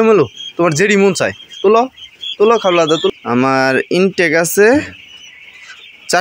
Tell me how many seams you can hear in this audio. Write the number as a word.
one